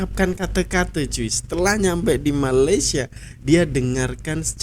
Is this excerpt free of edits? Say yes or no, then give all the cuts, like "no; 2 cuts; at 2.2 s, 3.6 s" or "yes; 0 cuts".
yes; 0 cuts